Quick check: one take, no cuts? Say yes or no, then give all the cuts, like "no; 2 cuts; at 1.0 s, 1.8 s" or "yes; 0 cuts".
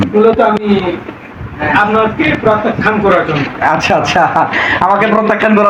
yes; 0 cuts